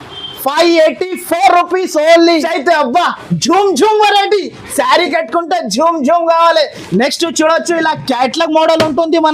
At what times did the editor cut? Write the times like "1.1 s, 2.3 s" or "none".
2.4 s